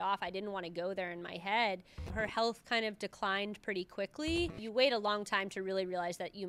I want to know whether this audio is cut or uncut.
cut